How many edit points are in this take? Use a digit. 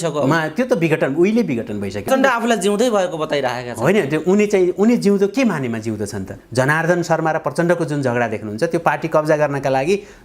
2